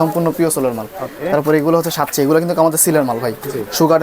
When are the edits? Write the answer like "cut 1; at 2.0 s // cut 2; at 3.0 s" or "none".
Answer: none